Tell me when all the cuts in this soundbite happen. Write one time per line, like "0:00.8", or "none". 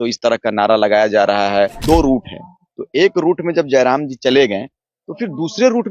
0:01.8